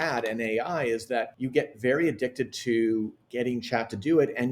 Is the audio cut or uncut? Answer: cut